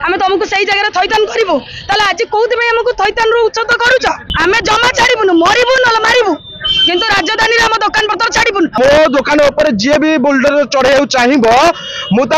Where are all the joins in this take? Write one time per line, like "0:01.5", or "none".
0:04.3
0:08.8

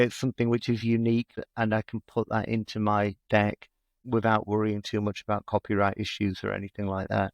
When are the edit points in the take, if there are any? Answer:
0:01.3
0:03.4

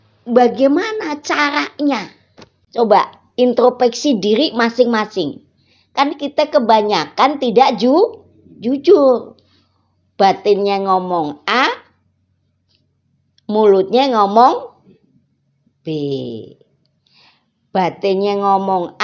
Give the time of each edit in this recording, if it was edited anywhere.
0:02.6

